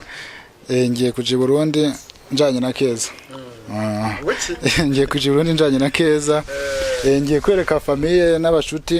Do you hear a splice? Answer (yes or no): no